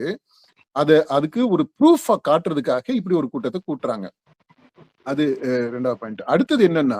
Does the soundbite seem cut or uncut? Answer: uncut